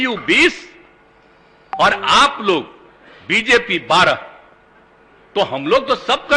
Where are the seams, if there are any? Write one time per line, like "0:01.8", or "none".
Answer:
none